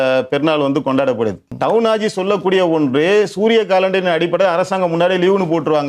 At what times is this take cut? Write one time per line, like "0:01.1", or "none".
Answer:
0:01.5